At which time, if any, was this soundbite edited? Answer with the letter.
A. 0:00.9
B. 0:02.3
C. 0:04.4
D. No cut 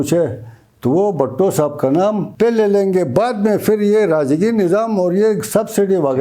B